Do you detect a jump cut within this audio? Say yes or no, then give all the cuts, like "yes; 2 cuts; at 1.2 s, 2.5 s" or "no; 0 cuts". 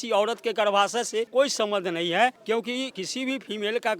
yes; 2 cuts; at 1.3 s, 2.8 s